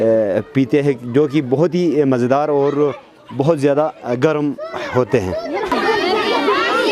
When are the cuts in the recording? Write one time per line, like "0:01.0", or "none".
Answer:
0:05.7